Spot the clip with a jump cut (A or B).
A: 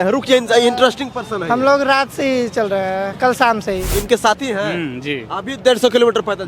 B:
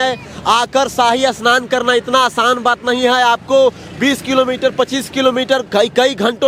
A